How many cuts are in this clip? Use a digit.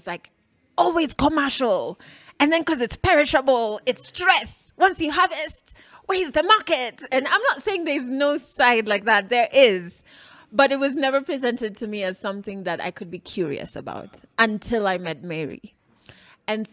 0